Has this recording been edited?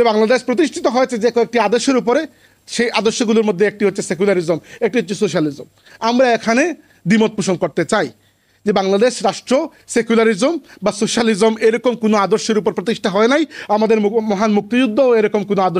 no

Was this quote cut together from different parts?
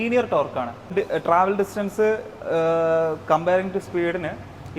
yes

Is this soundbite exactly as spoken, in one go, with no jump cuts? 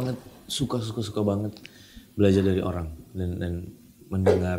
yes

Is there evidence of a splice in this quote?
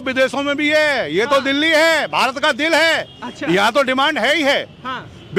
no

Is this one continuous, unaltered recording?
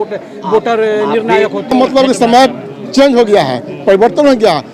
yes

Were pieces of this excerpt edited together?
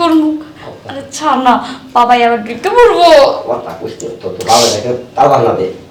no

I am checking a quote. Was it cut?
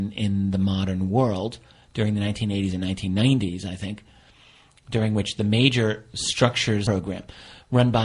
no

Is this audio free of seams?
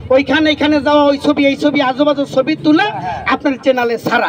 yes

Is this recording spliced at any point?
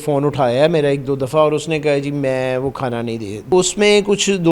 yes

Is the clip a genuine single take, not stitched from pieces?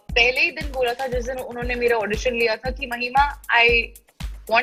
yes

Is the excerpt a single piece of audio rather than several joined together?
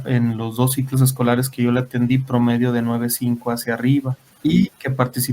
no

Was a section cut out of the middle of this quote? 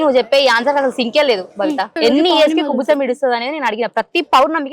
yes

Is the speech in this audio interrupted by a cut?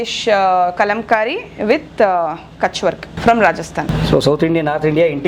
yes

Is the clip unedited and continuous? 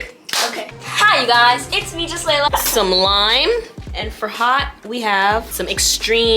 no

